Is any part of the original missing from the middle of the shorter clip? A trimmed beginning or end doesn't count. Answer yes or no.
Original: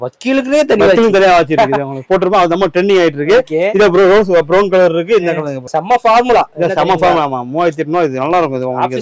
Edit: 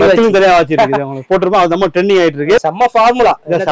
yes